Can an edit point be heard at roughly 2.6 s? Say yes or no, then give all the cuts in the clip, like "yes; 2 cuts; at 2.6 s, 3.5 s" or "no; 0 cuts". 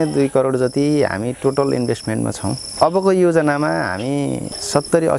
yes; 1 cut; at 2.6 s